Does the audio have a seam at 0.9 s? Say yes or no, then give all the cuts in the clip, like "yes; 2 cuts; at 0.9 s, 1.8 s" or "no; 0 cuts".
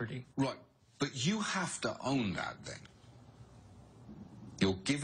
no; 1 cut; at 2.9 s